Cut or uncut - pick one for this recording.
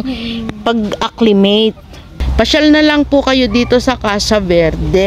cut